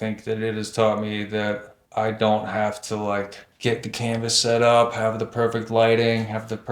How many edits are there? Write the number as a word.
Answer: two